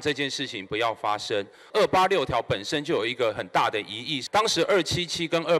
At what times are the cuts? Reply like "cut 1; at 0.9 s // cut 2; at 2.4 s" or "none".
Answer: cut 1; at 1.6 s // cut 2; at 4.1 s